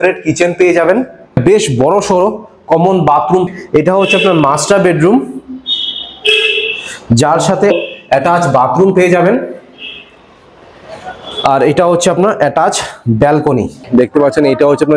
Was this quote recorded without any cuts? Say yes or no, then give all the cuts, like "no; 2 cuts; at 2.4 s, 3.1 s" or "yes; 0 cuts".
no; 4 cuts; at 1.4 s, 3.4 s, 7.7 s, 13.8 s